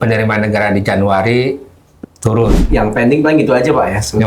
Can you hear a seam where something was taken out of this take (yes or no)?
yes